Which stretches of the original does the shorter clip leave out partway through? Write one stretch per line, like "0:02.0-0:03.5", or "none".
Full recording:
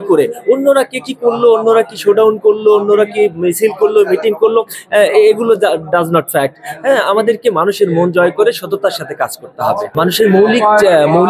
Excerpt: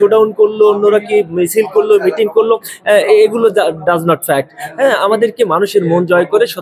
none